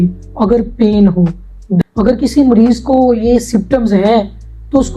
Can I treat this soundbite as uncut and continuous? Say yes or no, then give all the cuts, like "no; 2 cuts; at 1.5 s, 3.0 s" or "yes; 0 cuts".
no; 1 cut; at 1.8 s